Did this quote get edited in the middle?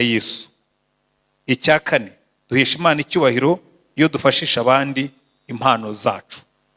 no; 0 cuts

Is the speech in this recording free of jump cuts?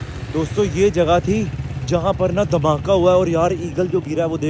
yes; 0 cuts

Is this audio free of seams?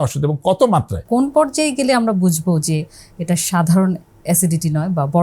no; 1 cut; at 1.0 s

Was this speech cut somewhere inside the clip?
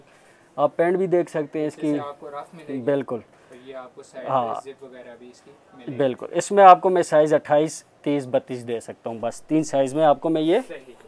no; 0 cuts

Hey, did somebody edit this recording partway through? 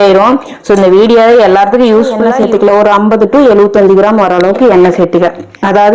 yes; 1 cut; at 2.2 s

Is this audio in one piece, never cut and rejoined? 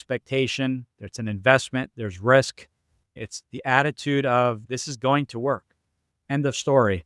no; 2 cuts; at 3.1 s, 4.6 s

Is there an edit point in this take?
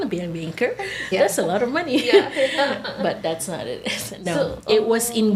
no; 0 cuts

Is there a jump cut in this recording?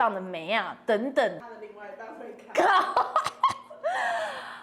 yes; 1 cut; at 1.4 s

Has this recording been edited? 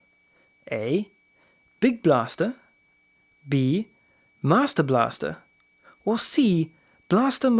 no; 0 cuts

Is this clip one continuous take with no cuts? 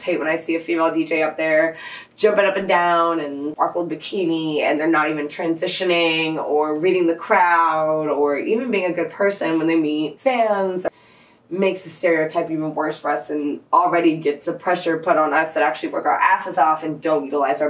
no; 3 cuts; at 3.5 s, 10.1 s, 10.9 s

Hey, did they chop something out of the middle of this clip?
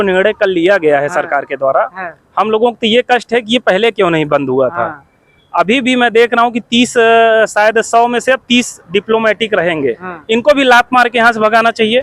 no; 0 cuts

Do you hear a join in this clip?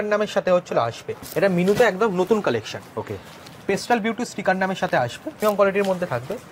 yes; 2 cuts; at 1.2 s, 5.4 s

